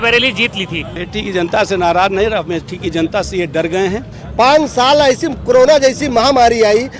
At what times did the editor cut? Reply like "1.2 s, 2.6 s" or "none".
1.0 s, 4.2 s